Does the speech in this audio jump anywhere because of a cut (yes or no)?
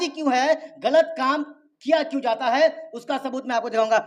no